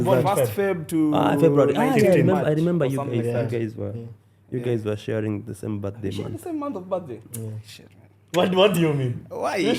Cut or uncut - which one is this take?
uncut